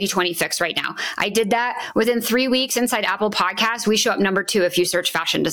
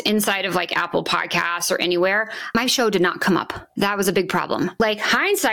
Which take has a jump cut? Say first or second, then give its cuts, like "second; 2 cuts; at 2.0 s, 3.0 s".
second; 3 cuts; at 2.5 s, 3.7 s, 4.8 s